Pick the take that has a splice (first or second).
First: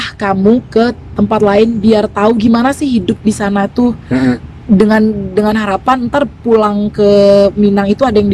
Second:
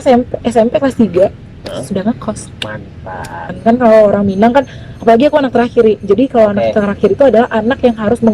second